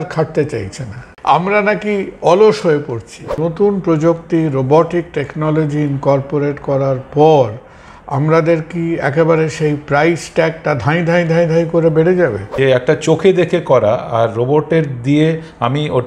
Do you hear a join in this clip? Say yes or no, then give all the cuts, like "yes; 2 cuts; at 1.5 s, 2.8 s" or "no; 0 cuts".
yes; 3 cuts; at 1.1 s, 3.4 s, 12.4 s